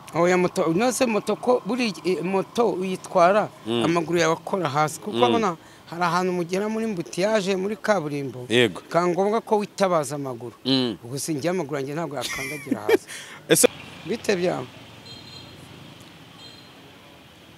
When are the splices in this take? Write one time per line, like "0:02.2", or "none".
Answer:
0:13.7